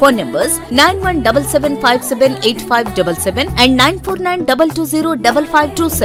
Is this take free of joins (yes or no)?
yes